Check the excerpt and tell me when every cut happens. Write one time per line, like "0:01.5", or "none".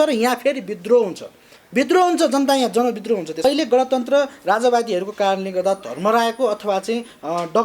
0:03.3